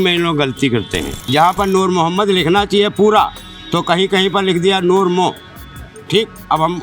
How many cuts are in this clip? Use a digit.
1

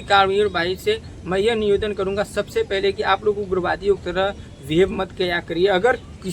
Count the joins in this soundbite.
0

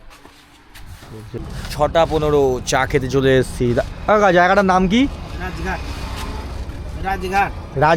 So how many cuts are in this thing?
1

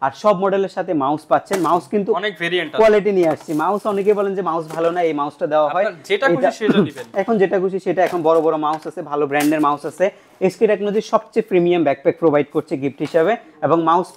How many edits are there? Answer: 0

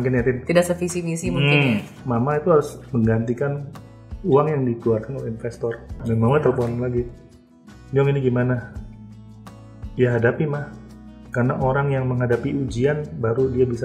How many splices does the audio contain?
2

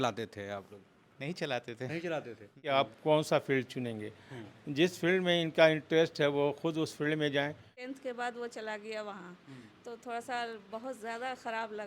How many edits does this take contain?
2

